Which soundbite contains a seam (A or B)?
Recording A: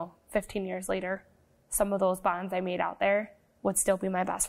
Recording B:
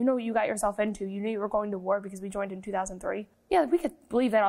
B